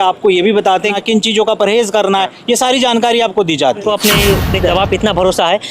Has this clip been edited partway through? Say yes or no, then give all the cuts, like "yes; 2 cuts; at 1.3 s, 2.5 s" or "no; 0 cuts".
yes; 2 cuts; at 1.0 s, 3.8 s